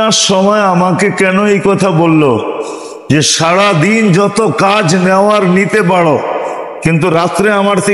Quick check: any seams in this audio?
no; 0 cuts

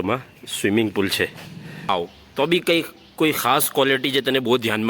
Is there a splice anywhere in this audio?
yes; 1 cut; at 1.9 s

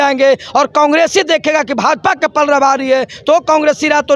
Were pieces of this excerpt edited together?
no; 0 cuts

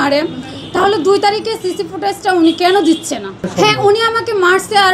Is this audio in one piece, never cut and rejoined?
no; 1 cut; at 3.4 s

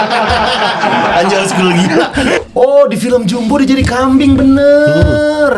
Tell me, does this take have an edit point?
yes; 1 cut; at 2.4 s

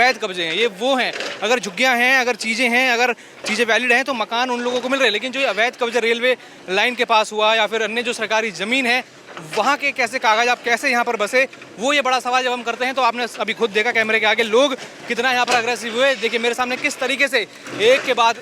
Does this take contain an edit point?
no; 0 cuts

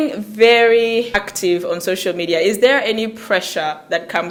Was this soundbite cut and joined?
no; 0 cuts

